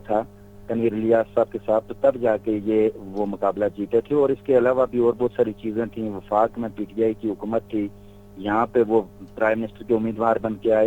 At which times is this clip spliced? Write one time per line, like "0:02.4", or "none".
none